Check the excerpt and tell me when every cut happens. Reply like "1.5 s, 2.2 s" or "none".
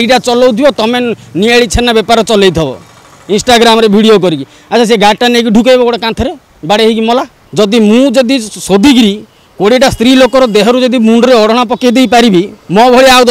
7.4 s